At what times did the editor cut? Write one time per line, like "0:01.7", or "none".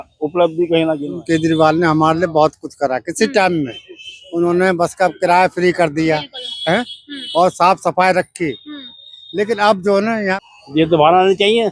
0:01.1
0:10.5